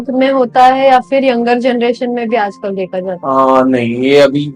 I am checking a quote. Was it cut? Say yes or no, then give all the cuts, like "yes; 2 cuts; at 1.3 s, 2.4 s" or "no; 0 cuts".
no; 0 cuts